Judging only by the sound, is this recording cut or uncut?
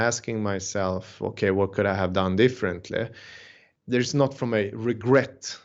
uncut